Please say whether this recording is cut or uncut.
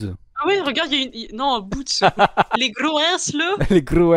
cut